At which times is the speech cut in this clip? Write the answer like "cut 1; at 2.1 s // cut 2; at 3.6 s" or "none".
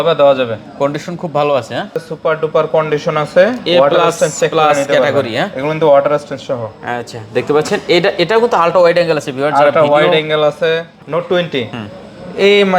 cut 1; at 2.0 s // cut 2; at 11.0 s